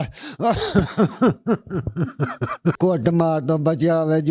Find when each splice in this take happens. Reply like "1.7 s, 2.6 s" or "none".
2.8 s

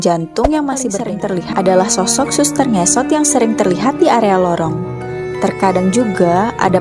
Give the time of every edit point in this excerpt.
1.0 s

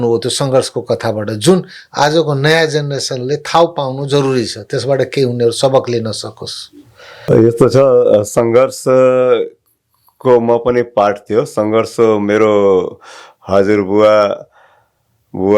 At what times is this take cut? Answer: 7.3 s

